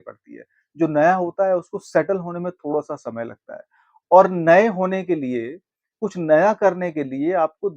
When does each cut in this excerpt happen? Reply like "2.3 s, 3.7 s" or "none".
none